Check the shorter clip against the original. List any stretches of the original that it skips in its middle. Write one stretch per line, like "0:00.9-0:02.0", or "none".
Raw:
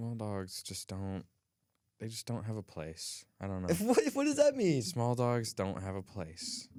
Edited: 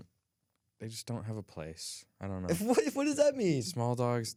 none